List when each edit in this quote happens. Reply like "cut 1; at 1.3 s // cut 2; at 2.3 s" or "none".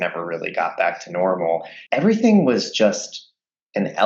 cut 1; at 1.8 s